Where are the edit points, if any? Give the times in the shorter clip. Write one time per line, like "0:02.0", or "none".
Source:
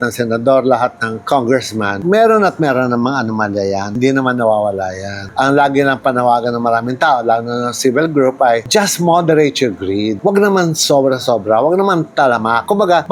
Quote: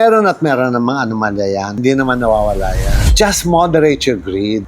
0:03.1